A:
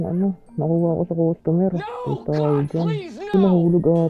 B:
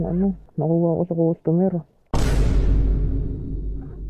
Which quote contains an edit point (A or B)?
B